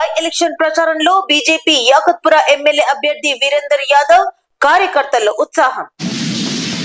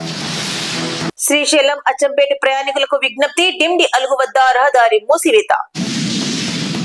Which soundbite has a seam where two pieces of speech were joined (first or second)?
second